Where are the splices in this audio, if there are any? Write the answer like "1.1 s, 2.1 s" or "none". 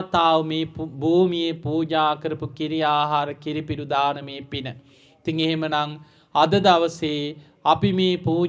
none

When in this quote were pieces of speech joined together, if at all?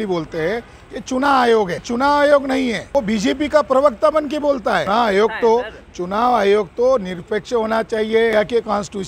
1.8 s, 2.9 s, 4.9 s, 8.3 s

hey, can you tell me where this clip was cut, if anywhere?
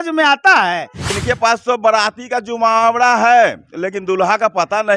1.2 s

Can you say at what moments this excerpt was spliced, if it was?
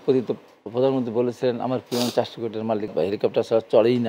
2.9 s

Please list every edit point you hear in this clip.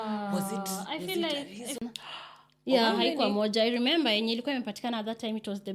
1.8 s

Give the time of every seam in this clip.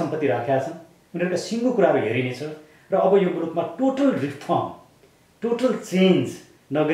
none

